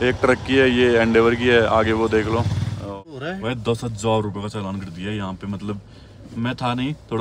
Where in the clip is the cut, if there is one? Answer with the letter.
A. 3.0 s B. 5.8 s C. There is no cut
A